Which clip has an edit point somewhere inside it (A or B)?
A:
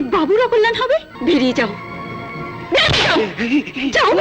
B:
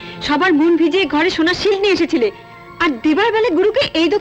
A